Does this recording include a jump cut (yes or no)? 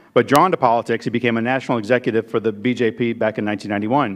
yes